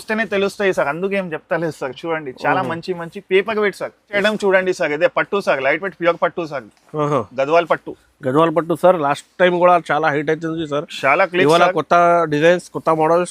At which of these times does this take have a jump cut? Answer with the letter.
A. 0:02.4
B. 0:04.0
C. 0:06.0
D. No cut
B